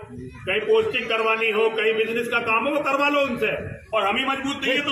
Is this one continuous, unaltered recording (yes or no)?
no